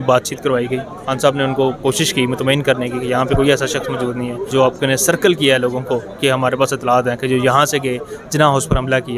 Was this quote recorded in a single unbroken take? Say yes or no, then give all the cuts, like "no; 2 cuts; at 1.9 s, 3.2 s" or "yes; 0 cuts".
yes; 0 cuts